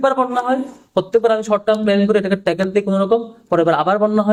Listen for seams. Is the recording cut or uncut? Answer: uncut